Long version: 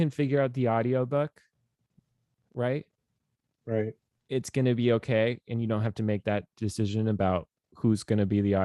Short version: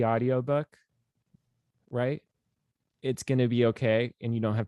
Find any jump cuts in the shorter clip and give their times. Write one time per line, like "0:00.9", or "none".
0:02.8